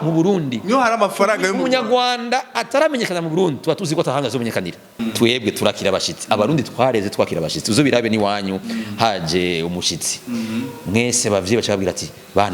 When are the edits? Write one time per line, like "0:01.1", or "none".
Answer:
0:05.0